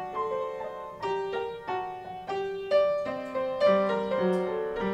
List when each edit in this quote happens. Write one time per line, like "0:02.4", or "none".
none

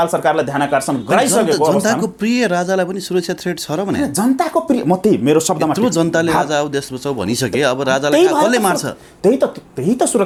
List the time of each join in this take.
none

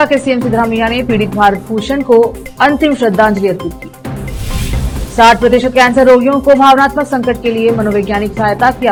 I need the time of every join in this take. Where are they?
none

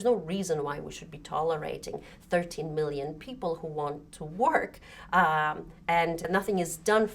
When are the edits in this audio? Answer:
0:06.2

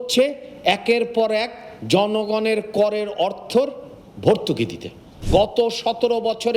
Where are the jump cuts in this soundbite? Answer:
0:05.1

